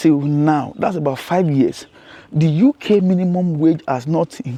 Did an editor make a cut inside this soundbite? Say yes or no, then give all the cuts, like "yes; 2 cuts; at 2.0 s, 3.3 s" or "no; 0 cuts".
no; 0 cuts